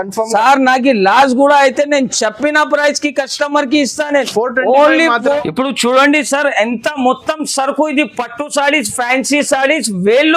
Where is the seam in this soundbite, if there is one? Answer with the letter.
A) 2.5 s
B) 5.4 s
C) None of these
B